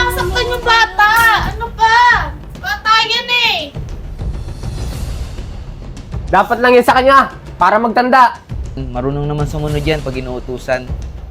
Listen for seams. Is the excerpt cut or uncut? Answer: cut